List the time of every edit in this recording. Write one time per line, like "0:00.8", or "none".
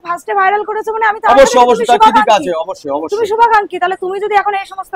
none